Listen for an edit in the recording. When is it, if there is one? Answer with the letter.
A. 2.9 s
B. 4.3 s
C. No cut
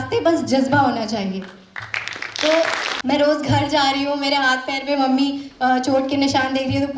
A